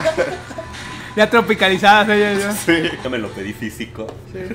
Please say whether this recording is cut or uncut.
cut